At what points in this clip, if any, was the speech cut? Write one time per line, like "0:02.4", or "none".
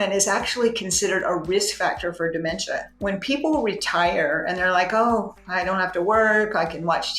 0:02.9